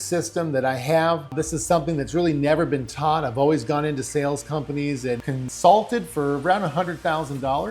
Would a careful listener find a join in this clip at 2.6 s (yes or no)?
no